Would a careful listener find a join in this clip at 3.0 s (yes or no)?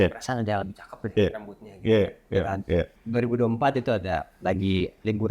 yes